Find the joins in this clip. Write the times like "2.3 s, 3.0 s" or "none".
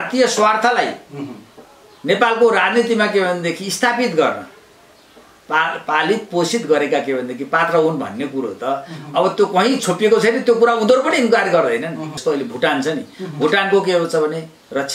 12.1 s